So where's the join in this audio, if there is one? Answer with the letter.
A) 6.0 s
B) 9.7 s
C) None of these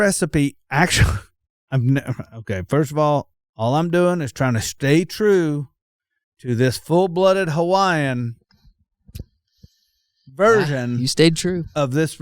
C